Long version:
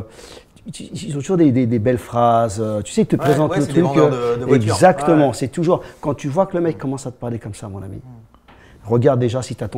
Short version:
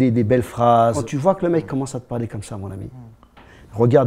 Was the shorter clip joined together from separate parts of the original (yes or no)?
yes